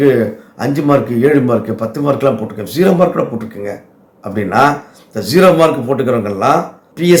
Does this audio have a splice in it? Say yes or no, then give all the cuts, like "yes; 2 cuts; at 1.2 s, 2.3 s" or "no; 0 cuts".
no; 0 cuts